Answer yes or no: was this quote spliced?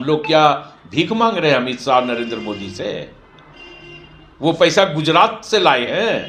no